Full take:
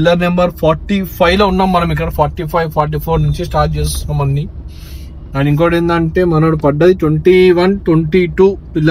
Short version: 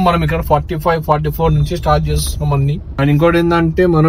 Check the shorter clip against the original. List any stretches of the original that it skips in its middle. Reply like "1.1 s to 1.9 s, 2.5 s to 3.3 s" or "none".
4.5 s to 5.2 s

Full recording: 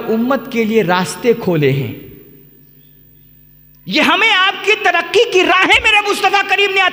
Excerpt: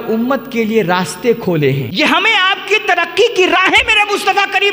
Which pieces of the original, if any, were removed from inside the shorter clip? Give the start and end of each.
1.9 s to 3.8 s

